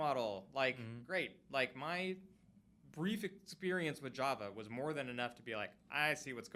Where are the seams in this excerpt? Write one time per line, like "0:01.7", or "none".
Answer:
none